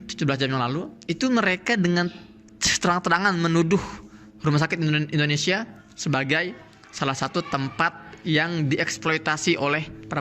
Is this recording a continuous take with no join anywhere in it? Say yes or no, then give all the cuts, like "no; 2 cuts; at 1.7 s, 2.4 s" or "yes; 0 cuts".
no; 1 cut; at 0.9 s